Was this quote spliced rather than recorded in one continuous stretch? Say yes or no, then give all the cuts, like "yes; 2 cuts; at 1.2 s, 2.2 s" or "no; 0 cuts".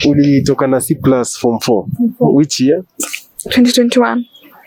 no; 0 cuts